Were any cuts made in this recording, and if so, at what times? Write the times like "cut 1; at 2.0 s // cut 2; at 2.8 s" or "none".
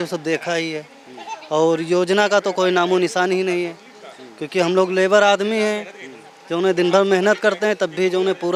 none